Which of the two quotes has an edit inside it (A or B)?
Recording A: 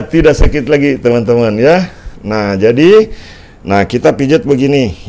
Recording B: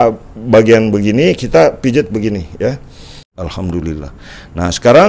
B